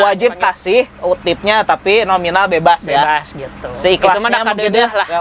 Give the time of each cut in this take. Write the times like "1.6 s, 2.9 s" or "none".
none